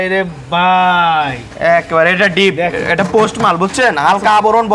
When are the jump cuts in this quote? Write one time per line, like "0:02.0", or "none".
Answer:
none